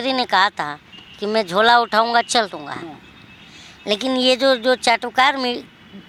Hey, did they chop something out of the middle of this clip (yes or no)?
no